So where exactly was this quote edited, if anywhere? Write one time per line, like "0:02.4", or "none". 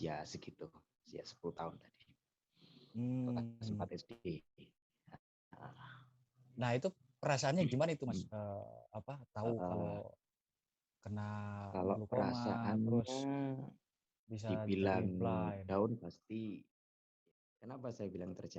0:17.1